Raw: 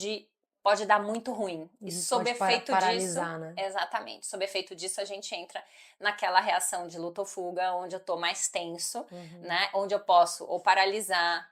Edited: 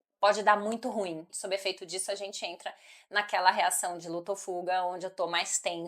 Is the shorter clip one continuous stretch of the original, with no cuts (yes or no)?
no